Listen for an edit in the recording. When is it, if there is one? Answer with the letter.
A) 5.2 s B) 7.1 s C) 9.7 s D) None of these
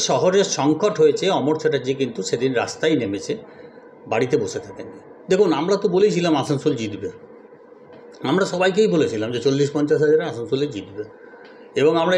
A